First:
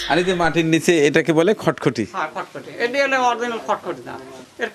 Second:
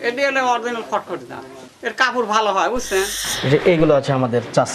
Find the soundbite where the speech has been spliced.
second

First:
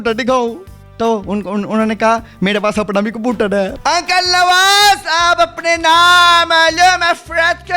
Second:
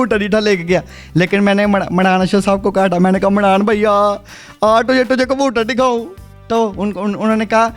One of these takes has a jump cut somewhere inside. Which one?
first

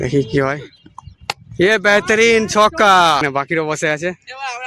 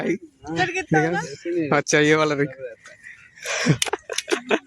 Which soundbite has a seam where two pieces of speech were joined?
first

